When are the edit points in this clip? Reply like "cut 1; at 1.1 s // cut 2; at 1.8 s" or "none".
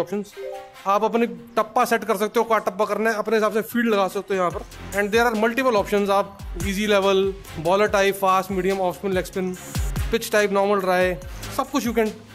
none